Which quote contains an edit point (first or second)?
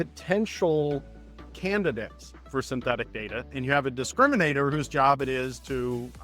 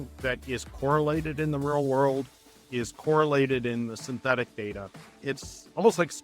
second